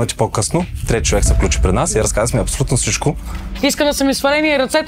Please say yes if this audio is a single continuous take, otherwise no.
no